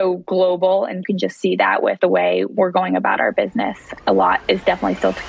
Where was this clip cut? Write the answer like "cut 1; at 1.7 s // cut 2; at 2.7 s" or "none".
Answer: cut 1; at 1.0 s // cut 2; at 2.2 s // cut 3; at 3.9 s